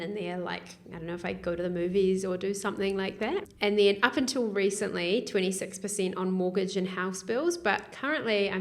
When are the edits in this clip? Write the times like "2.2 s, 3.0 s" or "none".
3.5 s